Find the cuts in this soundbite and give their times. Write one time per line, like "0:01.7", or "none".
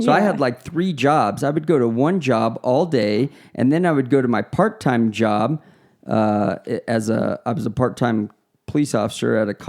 none